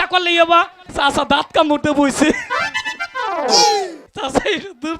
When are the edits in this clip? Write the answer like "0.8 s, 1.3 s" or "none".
0.9 s, 4.0 s